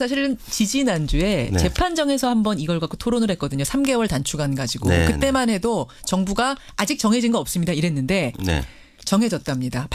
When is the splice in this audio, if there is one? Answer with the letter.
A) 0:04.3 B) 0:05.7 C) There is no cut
A